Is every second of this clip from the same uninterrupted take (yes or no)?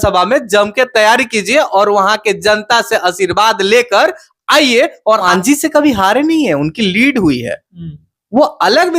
no